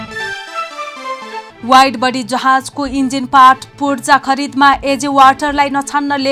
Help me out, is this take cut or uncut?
cut